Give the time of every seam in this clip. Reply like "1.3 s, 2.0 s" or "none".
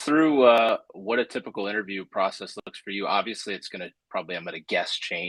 none